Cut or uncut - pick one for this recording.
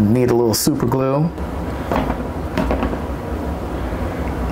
cut